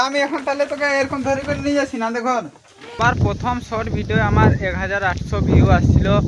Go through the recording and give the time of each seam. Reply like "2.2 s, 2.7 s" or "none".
2.9 s